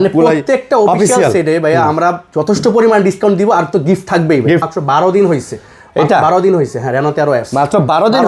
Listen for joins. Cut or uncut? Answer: cut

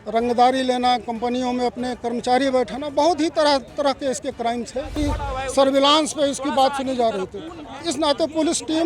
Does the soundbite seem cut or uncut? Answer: cut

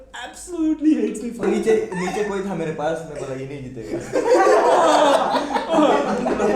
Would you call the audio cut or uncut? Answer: cut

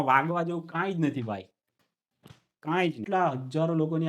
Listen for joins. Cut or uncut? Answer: cut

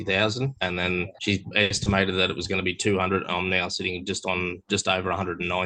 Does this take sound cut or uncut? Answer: uncut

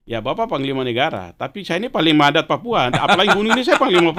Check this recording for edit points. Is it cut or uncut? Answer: uncut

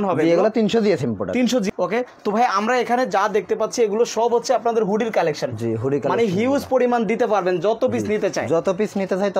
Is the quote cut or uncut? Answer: cut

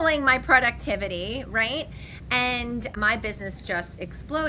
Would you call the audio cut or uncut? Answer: uncut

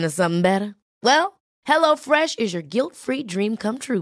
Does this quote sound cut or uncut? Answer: uncut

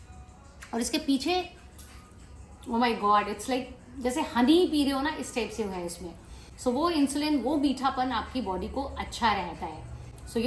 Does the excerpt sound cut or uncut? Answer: uncut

